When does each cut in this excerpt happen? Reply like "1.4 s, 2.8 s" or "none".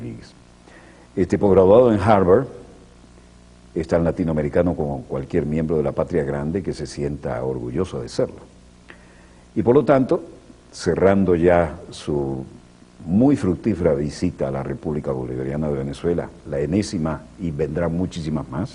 5.6 s